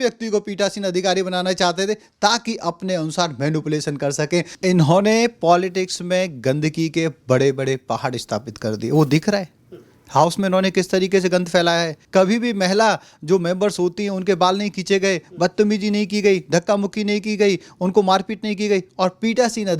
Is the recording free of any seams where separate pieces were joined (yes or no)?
no